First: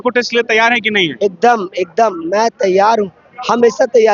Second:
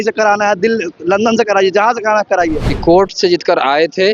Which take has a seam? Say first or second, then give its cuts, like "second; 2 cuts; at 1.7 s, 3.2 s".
second; 1 cut; at 2.7 s